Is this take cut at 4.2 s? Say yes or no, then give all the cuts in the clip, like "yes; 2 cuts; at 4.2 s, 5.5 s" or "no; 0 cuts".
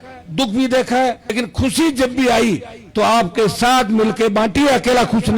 no; 1 cut; at 1.3 s